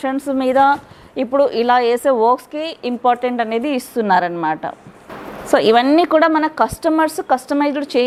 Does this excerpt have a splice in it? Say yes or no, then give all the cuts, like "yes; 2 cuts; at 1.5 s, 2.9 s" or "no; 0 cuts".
no; 0 cuts